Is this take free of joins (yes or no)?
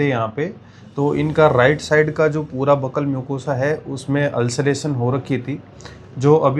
yes